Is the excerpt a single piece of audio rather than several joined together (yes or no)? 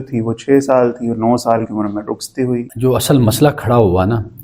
no